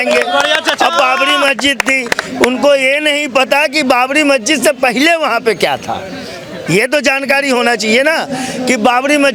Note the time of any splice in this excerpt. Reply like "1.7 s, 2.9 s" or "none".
none